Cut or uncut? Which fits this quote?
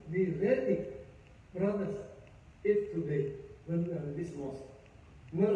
uncut